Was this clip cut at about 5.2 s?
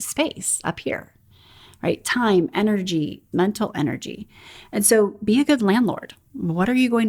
no; 1 cut; at 3.2 s

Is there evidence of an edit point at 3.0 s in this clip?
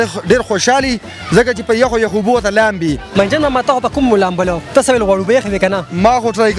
yes; 1 cut; at 3.0 s

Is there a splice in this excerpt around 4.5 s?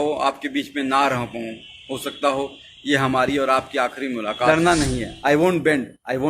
yes; 1 cut; at 4.5 s

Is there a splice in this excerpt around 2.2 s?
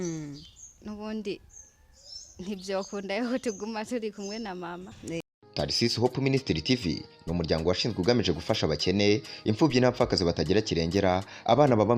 no; 1 cut; at 5.2 s

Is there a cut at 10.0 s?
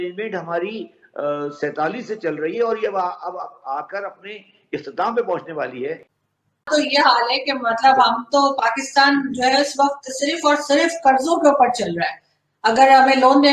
no; 1 cut; at 6.2 s

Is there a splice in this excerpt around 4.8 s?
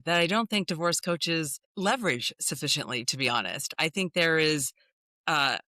no; 1 cut; at 1.6 s

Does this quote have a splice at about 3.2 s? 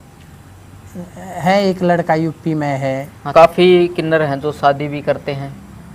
yes; 1 cut; at 3.2 s

